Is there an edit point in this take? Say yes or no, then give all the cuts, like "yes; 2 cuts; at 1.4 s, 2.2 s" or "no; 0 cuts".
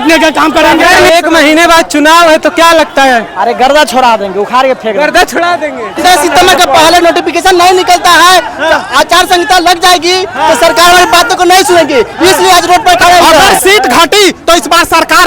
yes; 3 cuts; at 1.1 s, 6.0 s, 13.4 s